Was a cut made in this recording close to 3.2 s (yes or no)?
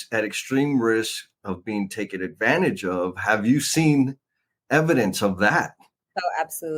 no